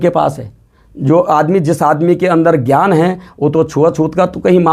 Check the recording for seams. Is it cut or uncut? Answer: uncut